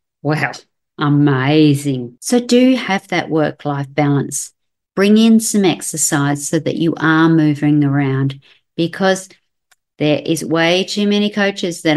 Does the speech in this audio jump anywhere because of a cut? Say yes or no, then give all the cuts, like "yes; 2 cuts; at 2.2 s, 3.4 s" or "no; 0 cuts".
yes; 1 cut; at 2.1 s